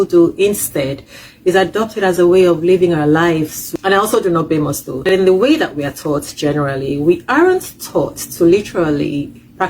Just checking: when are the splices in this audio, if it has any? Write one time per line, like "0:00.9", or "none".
0:03.6
0:05.1

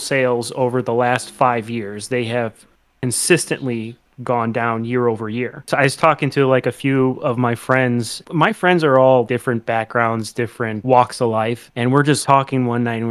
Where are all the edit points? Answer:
0:05.7
0:08.2
0:09.3
0:10.8
0:12.1

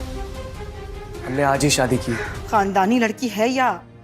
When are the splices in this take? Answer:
0:02.3

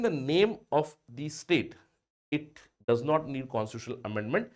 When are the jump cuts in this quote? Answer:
none

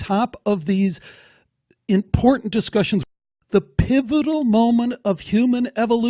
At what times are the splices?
0:03.0

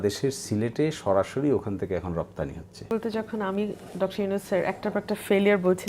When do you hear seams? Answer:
0:02.9

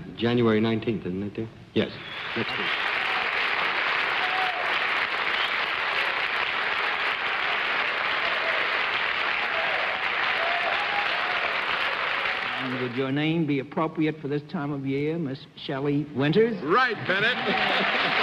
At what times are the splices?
0:06.3

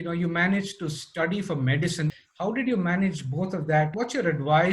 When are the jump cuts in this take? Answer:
0:02.1
0:03.9

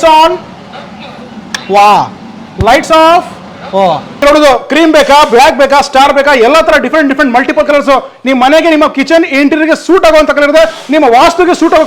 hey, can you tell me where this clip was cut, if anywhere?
0:04.2

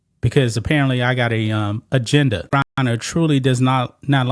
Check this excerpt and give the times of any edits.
0:02.8

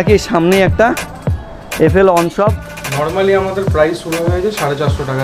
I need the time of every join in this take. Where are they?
0:02.8

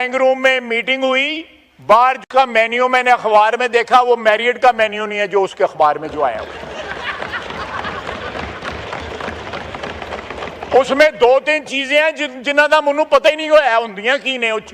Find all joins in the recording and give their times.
0:02.2

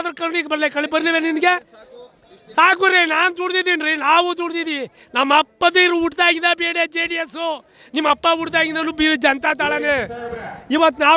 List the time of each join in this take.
none

